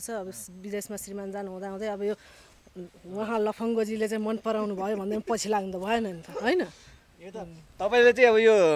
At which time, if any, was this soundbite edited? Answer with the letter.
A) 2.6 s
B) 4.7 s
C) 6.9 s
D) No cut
D